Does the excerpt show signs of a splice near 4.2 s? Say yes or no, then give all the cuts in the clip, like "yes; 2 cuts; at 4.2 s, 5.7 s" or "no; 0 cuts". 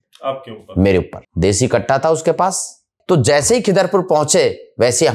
no; 2 cuts; at 1.2 s, 2.9 s